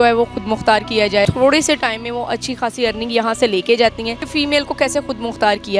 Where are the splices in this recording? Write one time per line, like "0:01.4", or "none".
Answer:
0:01.3
0:04.1